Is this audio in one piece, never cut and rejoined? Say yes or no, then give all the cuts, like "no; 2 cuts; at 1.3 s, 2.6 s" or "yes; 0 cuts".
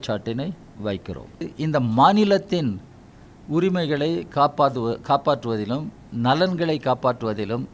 no; 1 cut; at 1.5 s